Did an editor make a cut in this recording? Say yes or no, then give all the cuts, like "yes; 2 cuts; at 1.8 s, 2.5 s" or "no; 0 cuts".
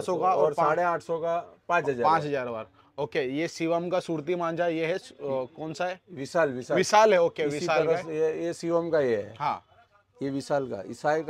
no; 0 cuts